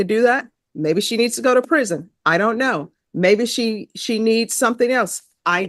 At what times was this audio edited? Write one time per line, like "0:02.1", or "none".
none